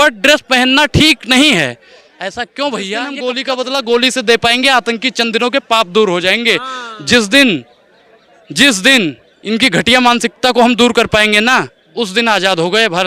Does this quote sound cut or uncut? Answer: cut